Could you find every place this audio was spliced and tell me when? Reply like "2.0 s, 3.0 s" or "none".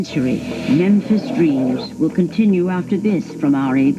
none